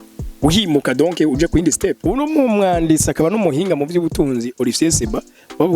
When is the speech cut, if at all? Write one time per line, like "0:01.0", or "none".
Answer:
0:02.0